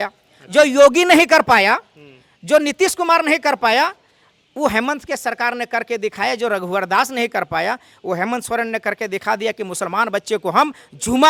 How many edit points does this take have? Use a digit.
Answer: 0